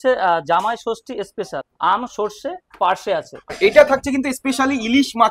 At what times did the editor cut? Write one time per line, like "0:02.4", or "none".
0:01.6
0:03.5